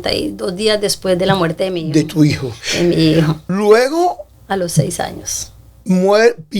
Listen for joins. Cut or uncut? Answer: cut